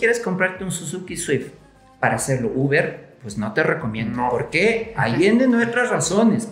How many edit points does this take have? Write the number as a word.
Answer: zero